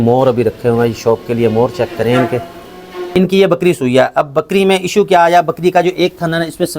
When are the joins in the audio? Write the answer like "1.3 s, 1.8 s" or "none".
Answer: 3.1 s

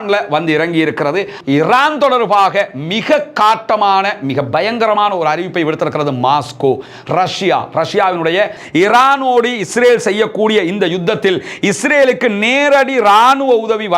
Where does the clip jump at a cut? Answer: 1.4 s, 8.6 s

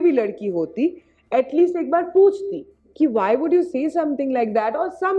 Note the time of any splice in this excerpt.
none

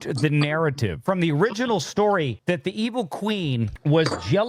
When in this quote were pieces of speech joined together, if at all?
1.0 s, 2.4 s

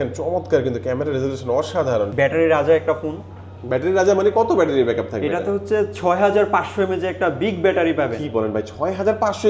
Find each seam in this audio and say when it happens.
2.1 s

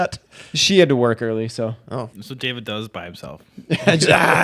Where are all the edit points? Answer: 2.1 s

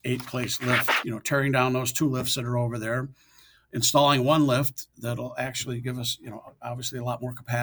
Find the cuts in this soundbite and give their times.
1.0 s

